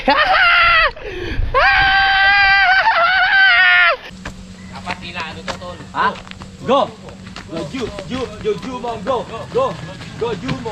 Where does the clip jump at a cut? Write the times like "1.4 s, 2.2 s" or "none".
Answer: 4.1 s

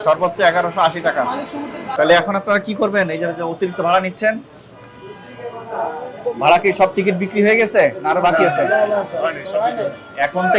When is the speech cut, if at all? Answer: 1.8 s

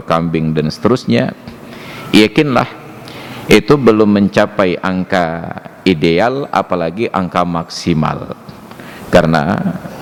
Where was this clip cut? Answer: none

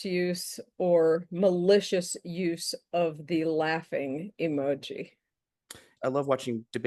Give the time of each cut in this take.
5.8 s

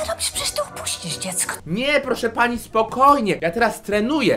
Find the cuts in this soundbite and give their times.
none

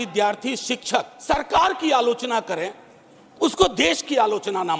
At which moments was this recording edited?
1.1 s

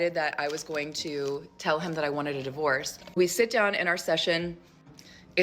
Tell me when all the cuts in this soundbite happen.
3.0 s

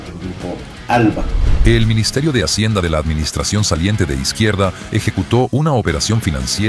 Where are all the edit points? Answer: 1.4 s

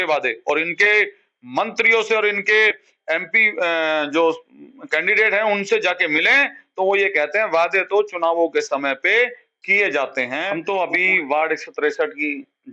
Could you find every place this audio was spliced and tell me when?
10.5 s

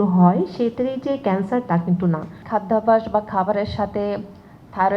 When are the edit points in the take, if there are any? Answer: 2.3 s

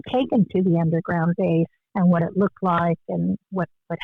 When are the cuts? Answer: 1.8 s

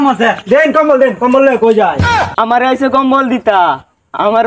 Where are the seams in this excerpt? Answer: 2.3 s

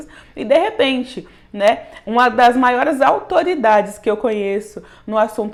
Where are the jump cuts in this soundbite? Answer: none

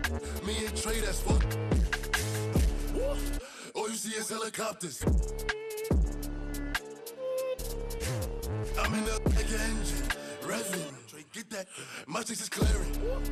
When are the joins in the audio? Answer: none

